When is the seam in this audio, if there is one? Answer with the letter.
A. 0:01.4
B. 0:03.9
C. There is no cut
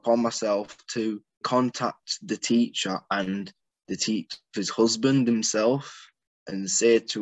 A